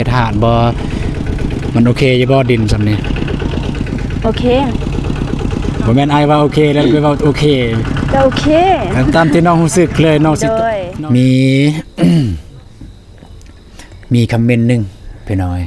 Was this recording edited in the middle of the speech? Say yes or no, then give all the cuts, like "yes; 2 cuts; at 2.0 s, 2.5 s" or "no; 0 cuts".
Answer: yes; 1 cut; at 10.8 s